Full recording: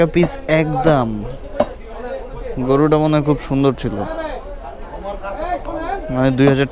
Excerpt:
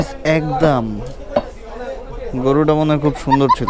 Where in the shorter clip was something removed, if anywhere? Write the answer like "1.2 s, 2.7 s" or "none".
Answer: none